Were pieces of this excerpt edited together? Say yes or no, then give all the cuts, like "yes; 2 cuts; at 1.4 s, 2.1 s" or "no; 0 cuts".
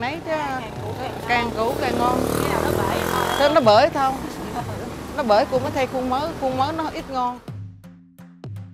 yes; 1 cut; at 7.5 s